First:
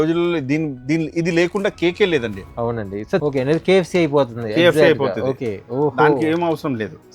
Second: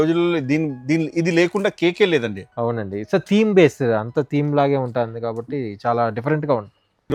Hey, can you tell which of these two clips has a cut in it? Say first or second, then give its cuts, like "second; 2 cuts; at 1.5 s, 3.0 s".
first; 1 cut; at 3.2 s